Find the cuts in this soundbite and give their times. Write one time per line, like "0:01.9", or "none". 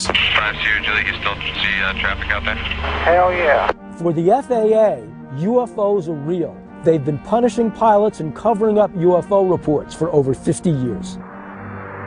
0:02.6